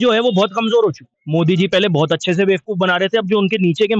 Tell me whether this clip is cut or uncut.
cut